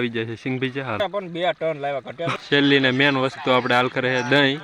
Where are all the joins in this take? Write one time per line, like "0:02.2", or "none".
0:01.0
0:02.4